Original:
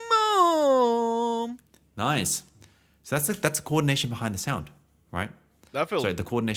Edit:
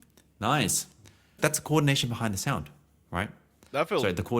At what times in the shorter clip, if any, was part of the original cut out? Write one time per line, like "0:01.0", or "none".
0:01.4